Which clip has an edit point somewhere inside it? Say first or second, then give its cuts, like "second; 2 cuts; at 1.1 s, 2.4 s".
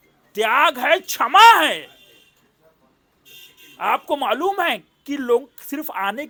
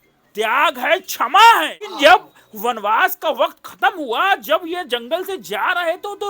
second; 1 cut; at 1.9 s